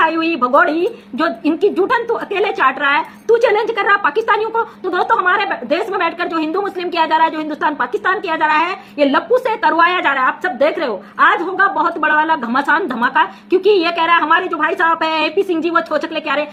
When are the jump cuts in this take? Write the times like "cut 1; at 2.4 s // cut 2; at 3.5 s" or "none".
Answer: none